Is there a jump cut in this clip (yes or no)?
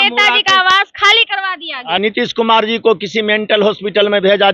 yes